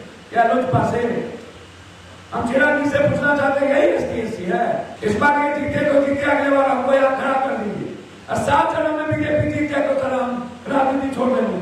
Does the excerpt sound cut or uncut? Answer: cut